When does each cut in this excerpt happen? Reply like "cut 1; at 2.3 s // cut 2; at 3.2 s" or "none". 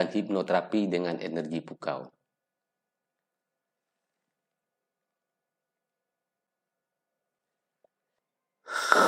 cut 1; at 8.1 s